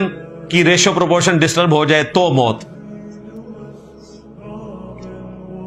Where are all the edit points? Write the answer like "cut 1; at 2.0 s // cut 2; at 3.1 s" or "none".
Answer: none

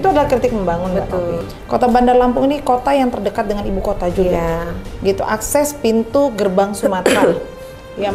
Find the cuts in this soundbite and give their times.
cut 1; at 1.4 s

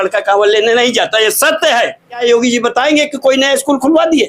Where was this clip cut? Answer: cut 1; at 2.2 s

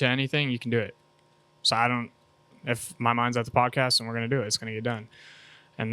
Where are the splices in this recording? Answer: none

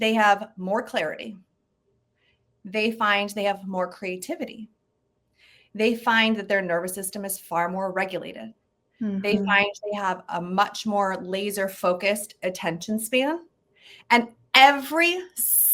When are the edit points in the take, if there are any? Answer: none

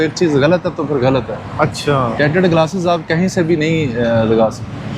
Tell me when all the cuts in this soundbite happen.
none

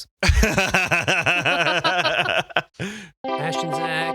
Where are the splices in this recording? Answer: cut 1; at 3.1 s

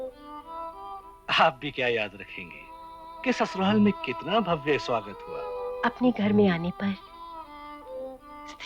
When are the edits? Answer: cut 1; at 5.7 s

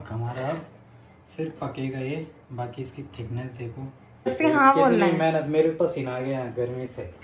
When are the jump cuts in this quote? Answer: cut 1; at 4.3 s

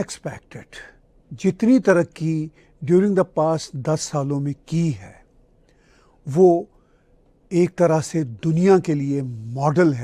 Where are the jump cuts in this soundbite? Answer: none

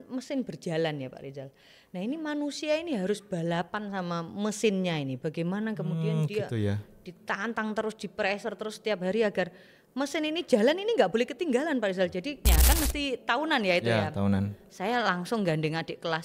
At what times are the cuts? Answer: cut 1; at 12.4 s

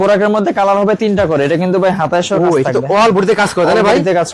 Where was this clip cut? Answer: none

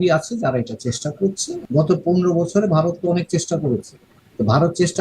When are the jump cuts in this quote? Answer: cut 1; at 1.5 s

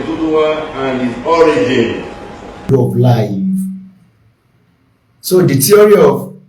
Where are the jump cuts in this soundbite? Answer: cut 1; at 2.7 s

